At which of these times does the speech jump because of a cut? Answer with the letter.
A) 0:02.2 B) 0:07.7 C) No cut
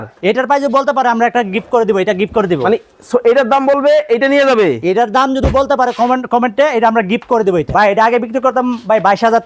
B